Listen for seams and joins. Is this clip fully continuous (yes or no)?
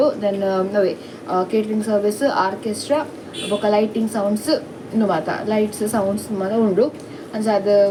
yes